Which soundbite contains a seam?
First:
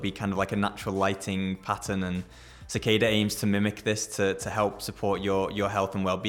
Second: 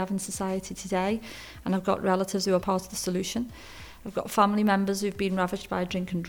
second; 1 cut; at 2.6 s

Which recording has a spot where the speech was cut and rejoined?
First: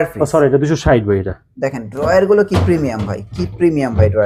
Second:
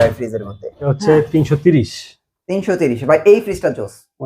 second; 1 cut; at 0.9 s

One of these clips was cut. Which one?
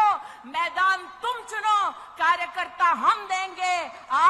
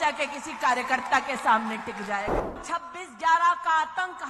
second; 1 cut; at 2.6 s

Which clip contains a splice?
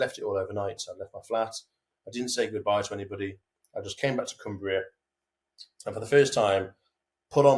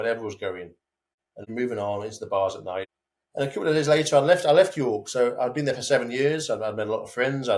second; 2 cuts; at 1.4 s, 2.9 s

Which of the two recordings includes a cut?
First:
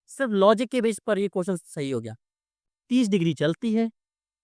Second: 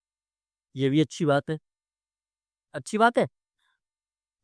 first; 1 cut; at 2.6 s

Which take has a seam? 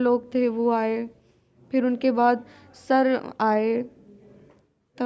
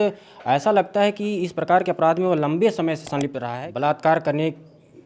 second; 1 cut; at 3.5 s

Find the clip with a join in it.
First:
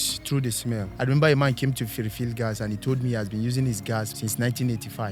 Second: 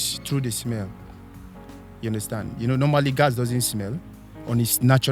first; 2 cuts; at 0.9 s, 4.1 s

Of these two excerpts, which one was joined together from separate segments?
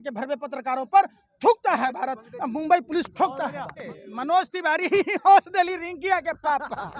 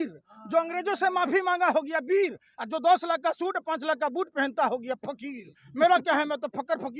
first; 1 cut; at 3.9 s

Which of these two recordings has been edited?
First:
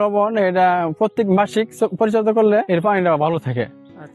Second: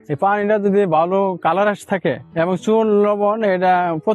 first; 1 cut; at 2.7 s

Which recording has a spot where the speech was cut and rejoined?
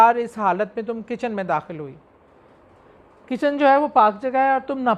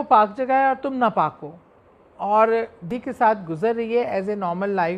second; 1 cut; at 2.9 s

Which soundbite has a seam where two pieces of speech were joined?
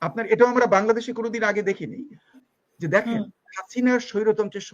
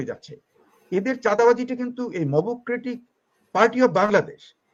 first; 1 cut; at 2.4 s

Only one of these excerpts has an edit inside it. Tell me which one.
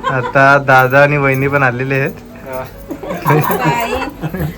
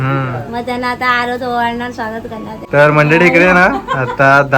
second; 1 cut; at 2.5 s

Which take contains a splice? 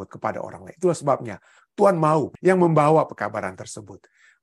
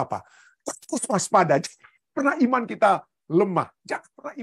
first; 1 cut; at 2.3 s

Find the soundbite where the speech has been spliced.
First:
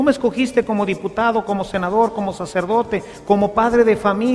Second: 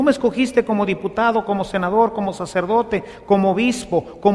first; 1 cut; at 3.2 s

